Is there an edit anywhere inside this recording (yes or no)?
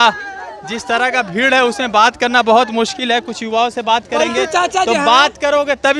no